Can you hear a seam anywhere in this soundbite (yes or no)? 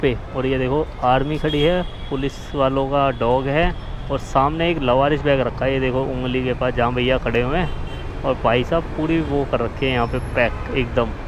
no